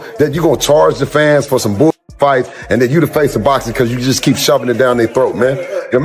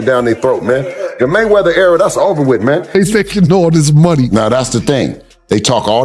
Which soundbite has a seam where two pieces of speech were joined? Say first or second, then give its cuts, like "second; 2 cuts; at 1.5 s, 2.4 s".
second; 1 cut; at 2.9 s